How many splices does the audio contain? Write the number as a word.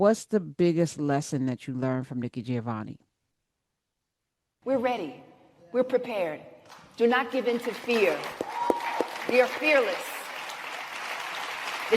one